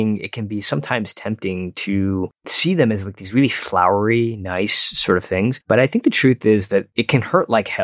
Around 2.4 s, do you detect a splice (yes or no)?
yes